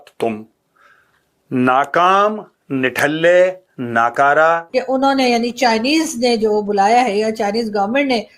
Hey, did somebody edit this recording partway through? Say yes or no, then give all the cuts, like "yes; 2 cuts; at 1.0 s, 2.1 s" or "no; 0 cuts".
yes; 1 cut; at 4.7 s